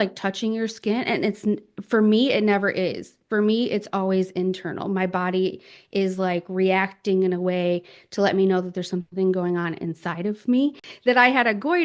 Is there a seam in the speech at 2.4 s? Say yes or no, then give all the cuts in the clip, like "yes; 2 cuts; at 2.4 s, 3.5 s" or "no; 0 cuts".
no; 1 cut; at 10.9 s